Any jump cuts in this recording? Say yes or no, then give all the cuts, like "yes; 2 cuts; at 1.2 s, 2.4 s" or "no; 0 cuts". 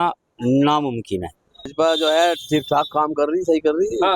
yes; 1 cut; at 1.7 s